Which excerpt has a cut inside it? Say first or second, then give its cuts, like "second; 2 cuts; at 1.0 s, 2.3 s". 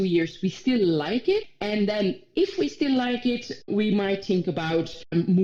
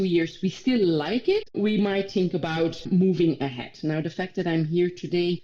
second; 2 cuts; at 1.5 s, 2.9 s